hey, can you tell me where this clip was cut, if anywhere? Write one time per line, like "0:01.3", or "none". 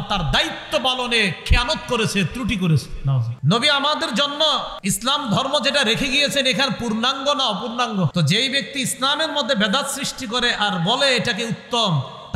0:03.3
0:04.7
0:08.1